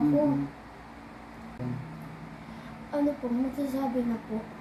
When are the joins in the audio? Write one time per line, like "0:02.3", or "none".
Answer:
0:01.6